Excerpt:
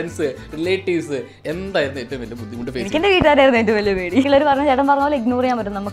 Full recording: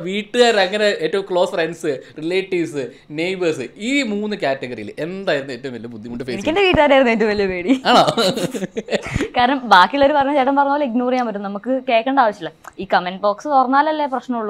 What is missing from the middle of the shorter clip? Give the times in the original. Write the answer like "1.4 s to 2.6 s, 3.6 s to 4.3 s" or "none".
3.0 s to 4.9 s, 7.8 s to 10.0 s

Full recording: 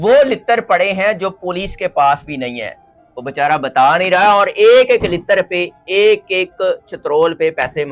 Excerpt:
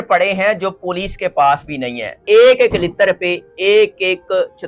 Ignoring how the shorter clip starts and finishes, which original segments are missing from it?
2.8 s to 4.5 s

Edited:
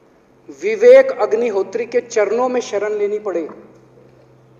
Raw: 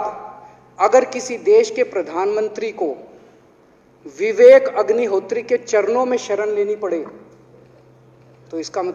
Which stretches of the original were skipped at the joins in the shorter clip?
none

